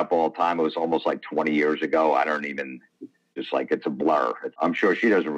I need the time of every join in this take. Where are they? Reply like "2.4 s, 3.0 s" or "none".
3.3 s, 4.5 s